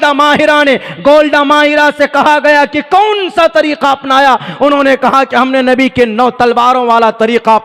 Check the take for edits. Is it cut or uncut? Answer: uncut